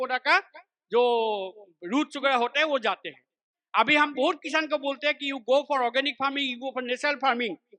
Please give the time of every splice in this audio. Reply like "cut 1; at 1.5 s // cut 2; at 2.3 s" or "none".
cut 1; at 3.5 s